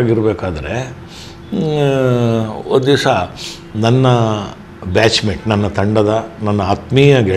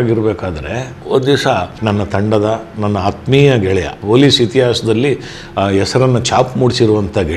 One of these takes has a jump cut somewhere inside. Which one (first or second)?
second